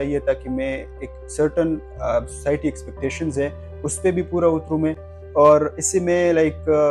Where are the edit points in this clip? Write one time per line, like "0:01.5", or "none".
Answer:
none

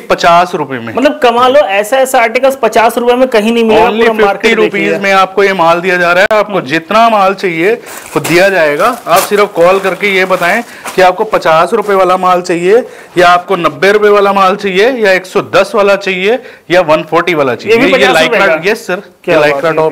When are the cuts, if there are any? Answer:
none

